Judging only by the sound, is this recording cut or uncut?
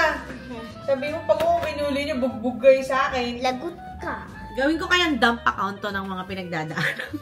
cut